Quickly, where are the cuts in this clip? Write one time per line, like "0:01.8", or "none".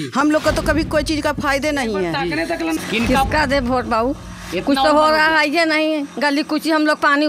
0:02.8